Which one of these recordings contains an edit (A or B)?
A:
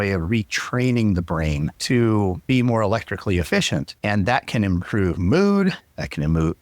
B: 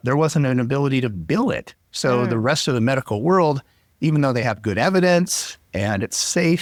A